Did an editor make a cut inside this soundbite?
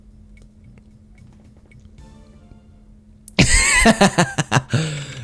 no; 0 cuts

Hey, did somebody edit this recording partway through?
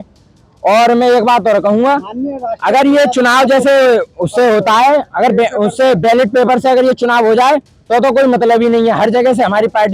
no; 0 cuts

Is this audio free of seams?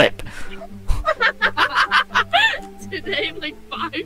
yes; 0 cuts

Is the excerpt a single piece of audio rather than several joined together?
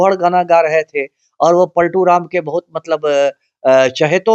yes; 0 cuts

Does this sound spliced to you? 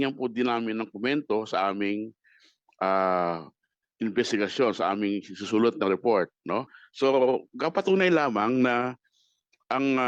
yes; 1 cut; at 6.8 s

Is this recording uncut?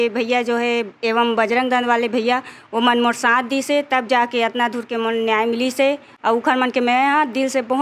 yes; 0 cuts

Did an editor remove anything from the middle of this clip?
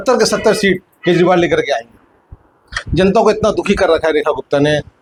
no; 0 cuts

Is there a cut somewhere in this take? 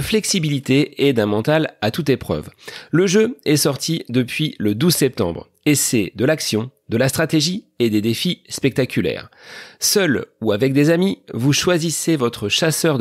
no; 0 cuts

